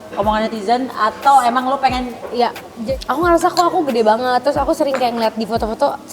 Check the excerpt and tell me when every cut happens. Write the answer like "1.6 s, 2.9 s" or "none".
2.8 s